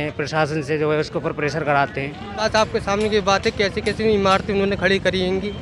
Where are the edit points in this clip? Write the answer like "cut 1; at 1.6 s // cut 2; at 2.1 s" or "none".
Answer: cut 1; at 2.5 s